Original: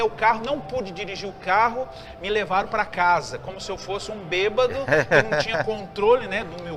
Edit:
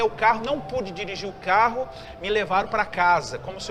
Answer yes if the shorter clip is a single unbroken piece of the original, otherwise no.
yes